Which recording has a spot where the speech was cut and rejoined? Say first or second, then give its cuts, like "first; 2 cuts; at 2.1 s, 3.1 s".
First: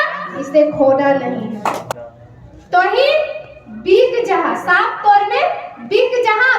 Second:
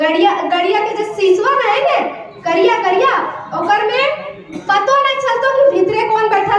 first; 1 cut; at 1.9 s